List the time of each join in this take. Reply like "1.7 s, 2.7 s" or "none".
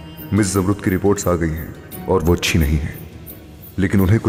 none

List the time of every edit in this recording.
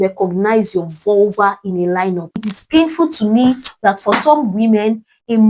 2.5 s

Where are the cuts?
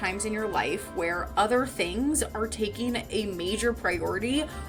none

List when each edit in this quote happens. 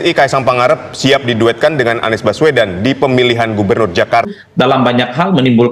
4.3 s

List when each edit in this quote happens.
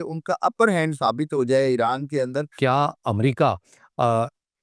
2.5 s

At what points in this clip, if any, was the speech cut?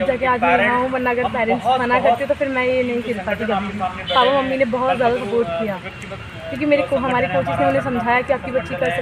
none

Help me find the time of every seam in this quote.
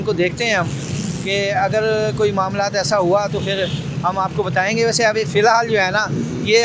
none

